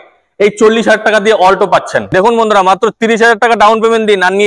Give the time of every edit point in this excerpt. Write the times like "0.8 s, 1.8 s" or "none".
2.1 s